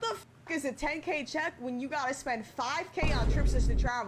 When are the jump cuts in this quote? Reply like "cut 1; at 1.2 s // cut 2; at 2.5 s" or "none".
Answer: none